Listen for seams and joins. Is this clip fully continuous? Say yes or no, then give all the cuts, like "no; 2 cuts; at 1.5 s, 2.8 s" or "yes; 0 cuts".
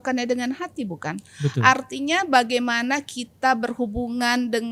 yes; 0 cuts